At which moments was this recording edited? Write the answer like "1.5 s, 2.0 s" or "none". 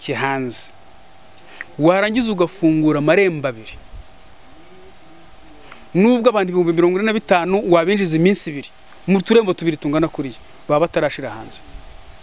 none